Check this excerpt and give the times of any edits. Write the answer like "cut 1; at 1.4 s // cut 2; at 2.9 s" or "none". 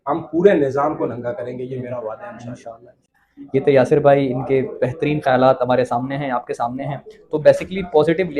none